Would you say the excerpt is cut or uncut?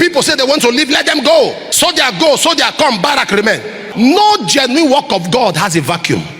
cut